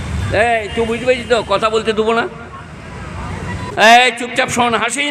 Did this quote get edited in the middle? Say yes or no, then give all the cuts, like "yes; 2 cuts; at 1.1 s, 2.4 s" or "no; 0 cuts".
yes; 1 cut; at 3.7 s